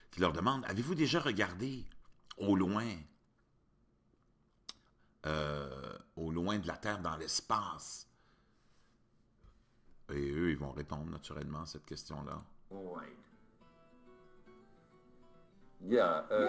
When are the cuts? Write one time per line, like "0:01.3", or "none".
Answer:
none